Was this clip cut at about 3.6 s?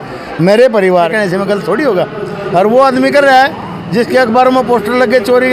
no; 1 cut; at 1.1 s

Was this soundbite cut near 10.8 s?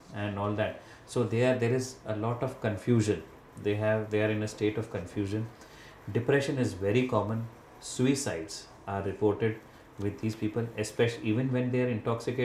no; 0 cuts

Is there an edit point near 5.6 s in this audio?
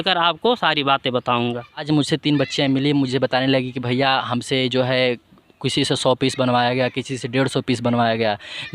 no; 1 cut; at 1.8 s

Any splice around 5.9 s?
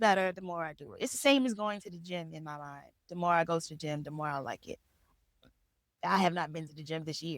yes; 1 cut; at 5.9 s

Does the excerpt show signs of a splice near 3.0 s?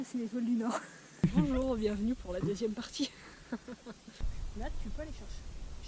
no; 2 cuts; at 1.2 s, 4.3 s

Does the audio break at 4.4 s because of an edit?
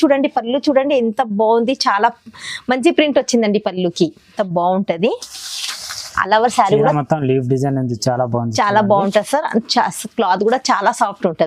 yes; 1 cut; at 4.4 s

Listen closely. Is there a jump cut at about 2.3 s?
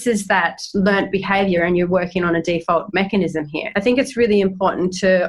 no; 1 cut; at 3.6 s

